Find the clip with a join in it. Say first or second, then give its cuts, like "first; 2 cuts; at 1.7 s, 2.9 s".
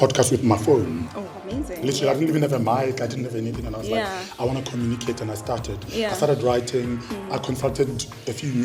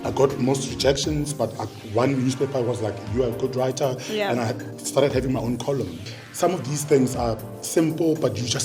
second; 1 cut; at 6.0 s